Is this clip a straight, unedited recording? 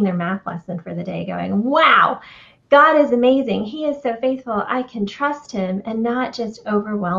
yes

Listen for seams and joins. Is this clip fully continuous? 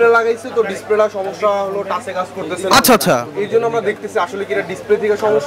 yes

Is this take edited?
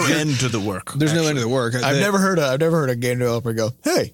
no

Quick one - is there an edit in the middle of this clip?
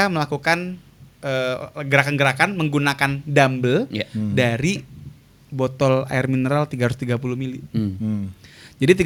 no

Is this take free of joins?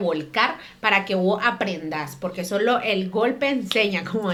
yes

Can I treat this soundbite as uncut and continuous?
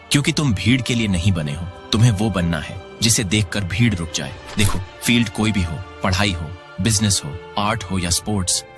yes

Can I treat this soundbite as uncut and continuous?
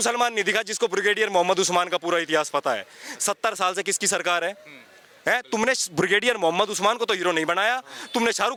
yes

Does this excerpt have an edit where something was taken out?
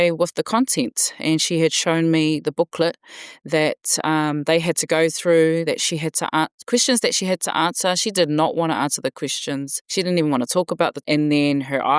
yes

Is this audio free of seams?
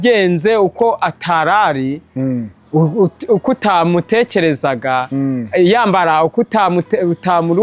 yes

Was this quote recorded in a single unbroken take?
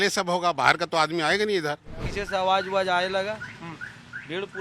no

